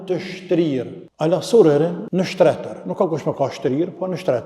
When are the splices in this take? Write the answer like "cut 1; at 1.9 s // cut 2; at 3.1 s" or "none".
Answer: cut 1; at 1.0 s // cut 2; at 2.0 s